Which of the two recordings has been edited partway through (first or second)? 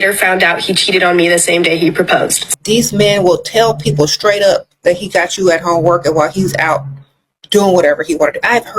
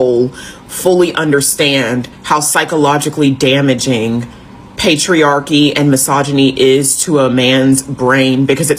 first